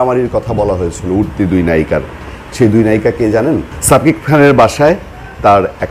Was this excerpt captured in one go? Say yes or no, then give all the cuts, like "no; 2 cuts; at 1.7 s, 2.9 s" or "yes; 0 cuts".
no; 1 cut; at 3.7 s